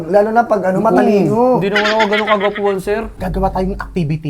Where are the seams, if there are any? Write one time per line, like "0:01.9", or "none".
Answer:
0:03.1

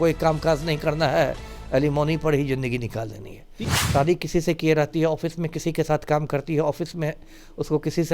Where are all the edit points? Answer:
0:03.5

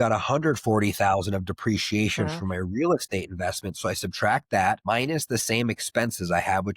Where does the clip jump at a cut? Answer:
0:04.8

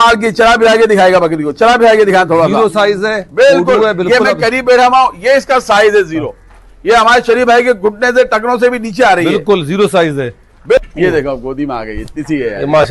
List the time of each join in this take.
0:10.8

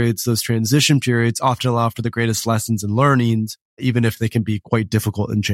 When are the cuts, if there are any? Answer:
0:03.8
0:04.6

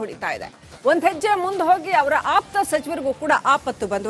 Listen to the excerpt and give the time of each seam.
none

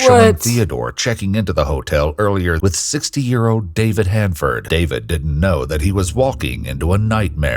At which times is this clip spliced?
0:02.6
0:04.6

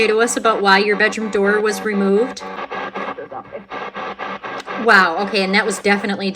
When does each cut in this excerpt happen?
0:02.6

